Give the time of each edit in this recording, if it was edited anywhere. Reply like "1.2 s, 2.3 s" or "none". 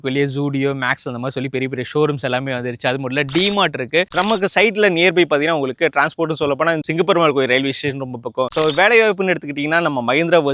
4.1 s, 8.6 s